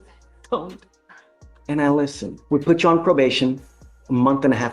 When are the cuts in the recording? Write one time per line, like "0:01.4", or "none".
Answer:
0:02.3